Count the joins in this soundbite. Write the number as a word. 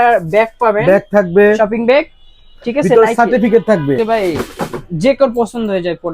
zero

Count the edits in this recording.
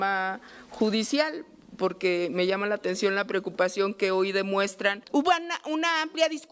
one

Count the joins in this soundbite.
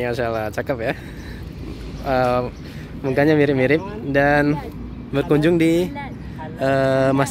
zero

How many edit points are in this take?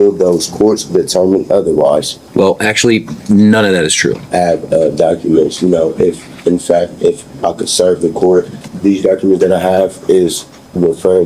three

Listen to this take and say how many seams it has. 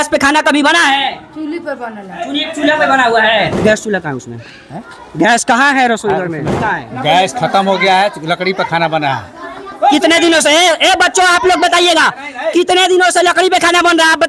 two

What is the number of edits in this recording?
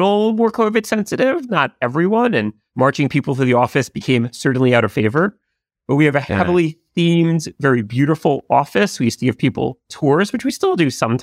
one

